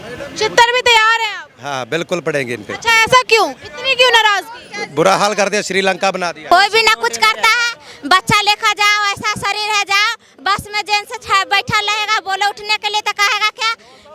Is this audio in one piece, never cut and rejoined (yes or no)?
no